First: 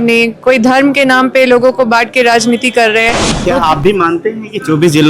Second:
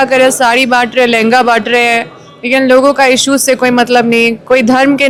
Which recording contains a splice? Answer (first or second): first